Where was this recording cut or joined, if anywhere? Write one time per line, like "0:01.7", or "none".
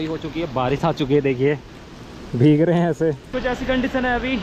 0:03.3

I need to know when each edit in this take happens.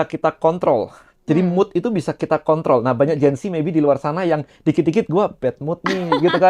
none

